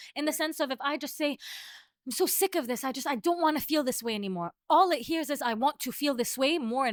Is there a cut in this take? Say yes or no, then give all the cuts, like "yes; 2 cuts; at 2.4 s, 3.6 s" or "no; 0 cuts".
no; 0 cuts